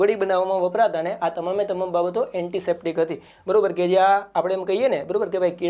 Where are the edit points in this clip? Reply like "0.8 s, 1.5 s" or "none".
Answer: none